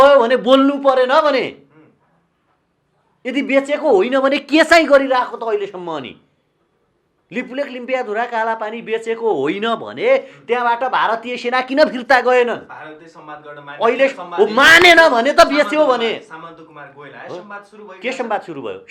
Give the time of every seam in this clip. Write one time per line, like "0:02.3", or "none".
none